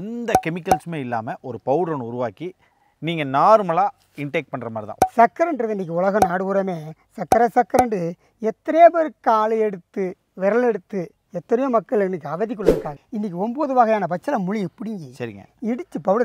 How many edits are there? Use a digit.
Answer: 2